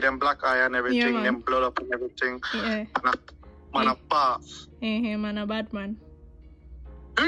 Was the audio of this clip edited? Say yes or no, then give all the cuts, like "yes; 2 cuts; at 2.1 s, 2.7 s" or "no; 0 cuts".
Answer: no; 0 cuts